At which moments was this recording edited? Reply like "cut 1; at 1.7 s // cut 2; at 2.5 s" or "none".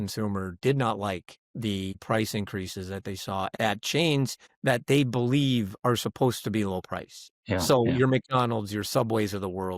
cut 1; at 1.9 s // cut 2; at 3.5 s // cut 3; at 4.4 s // cut 4; at 7.7 s